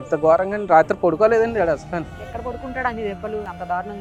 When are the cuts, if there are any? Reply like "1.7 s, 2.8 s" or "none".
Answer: none